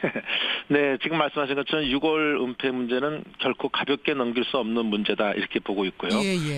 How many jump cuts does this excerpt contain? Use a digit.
1